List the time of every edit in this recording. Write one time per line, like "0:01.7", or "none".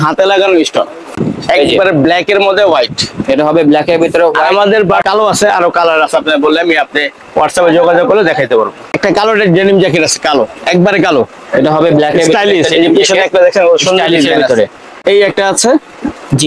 0:01.3
0:05.0
0:08.9
0:14.9